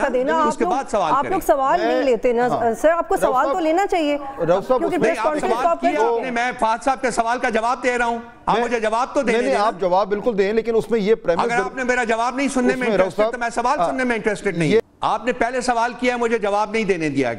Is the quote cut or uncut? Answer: cut